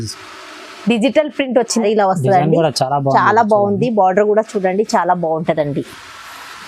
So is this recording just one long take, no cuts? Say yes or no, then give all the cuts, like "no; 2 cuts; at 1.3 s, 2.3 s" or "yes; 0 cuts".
no; 1 cut; at 1.8 s